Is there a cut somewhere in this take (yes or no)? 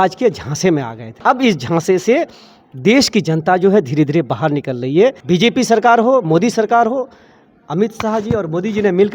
yes